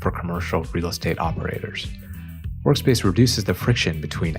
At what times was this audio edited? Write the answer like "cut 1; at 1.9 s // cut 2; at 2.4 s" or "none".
none